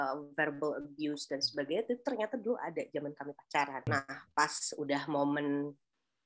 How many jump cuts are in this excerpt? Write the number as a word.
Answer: one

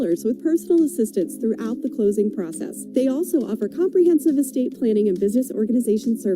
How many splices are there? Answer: one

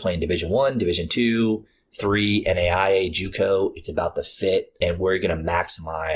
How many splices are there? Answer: one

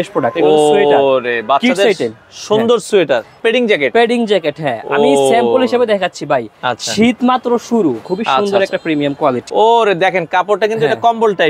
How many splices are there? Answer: three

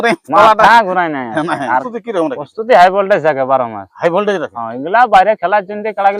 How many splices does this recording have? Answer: one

